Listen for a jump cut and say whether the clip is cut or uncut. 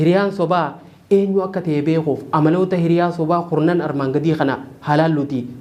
uncut